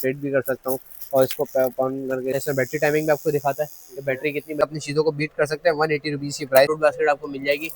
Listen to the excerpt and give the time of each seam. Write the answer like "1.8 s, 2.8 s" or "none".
2.3 s, 4.6 s, 6.7 s